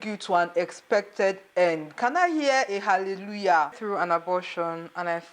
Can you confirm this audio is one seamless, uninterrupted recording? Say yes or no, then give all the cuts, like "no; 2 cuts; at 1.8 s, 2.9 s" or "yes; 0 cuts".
no; 1 cut; at 3.8 s